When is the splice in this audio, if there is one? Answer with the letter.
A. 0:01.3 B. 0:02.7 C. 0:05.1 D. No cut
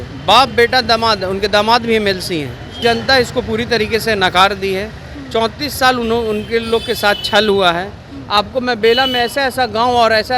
B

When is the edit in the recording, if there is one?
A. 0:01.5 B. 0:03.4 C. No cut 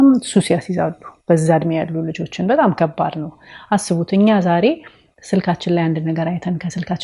C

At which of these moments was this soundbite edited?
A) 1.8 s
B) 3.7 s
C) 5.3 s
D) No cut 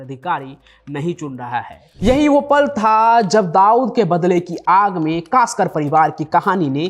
A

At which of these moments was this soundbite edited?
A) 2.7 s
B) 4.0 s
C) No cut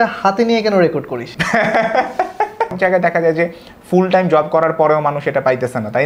A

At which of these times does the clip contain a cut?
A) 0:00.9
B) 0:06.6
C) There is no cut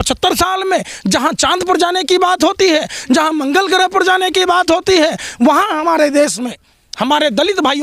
C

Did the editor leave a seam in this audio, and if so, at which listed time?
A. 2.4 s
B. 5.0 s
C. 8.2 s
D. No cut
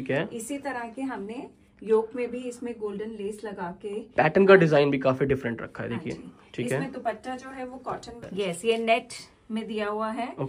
C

